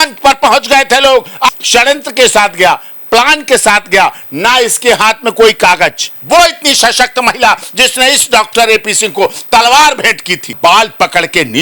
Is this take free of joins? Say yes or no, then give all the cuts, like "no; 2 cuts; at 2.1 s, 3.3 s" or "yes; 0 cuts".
no; 3 cuts; at 1.5 s, 6.1 s, 10.5 s